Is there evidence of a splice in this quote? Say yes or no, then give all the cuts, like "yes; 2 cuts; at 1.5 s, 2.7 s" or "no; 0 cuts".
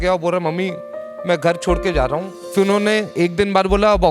yes; 1 cut; at 2.4 s